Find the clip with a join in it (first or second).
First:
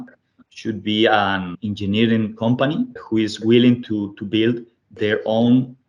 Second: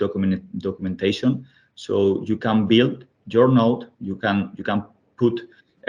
first